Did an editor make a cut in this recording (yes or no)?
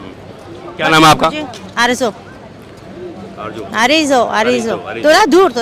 no